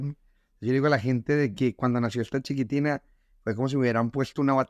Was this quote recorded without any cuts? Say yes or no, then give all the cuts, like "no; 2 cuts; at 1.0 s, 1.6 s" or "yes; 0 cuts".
yes; 0 cuts